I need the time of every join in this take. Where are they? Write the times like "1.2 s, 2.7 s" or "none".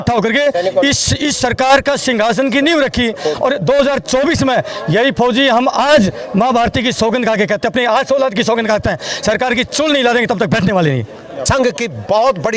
11.2 s